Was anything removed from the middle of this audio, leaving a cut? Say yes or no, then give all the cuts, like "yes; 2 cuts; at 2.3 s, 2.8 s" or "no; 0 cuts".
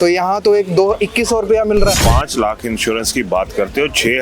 yes; 1 cut; at 2.0 s